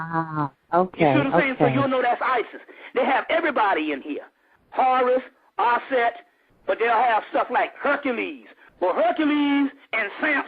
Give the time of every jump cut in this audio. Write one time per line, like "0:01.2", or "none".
0:04.7